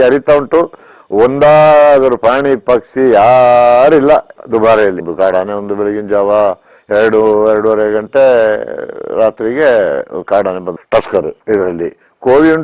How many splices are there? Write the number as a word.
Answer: two